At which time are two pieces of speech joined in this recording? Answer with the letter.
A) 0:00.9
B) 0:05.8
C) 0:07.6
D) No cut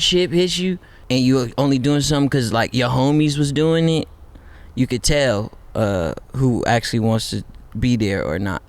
A